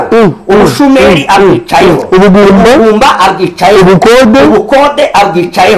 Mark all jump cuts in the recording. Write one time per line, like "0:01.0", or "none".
none